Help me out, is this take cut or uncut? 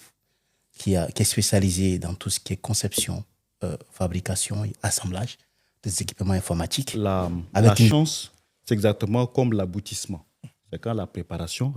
cut